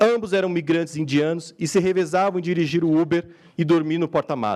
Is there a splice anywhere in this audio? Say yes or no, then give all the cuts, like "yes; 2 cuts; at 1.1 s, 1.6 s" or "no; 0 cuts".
no; 0 cuts